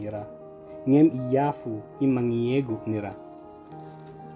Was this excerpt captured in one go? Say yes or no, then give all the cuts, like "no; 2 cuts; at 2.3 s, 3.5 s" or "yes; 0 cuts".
no; 1 cut; at 3.1 s